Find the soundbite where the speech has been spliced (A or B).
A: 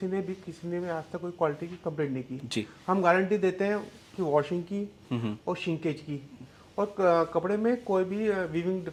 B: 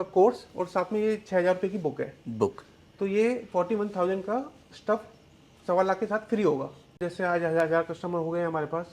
B